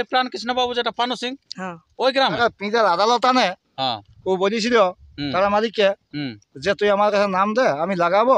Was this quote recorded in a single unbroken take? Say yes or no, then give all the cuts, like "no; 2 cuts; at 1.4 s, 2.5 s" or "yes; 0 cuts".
no; 1 cut; at 2.4 s